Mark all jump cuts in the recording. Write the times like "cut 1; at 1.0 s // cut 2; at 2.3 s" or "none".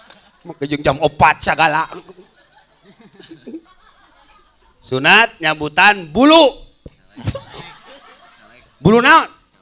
cut 1; at 3.7 s